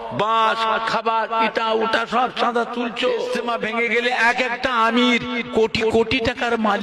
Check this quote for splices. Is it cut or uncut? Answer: cut